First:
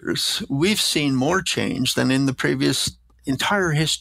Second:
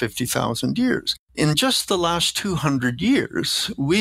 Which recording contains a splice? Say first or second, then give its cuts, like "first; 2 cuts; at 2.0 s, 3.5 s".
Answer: second; 1 cut; at 1.2 s